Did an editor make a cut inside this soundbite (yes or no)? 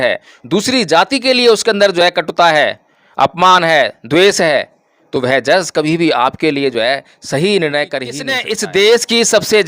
yes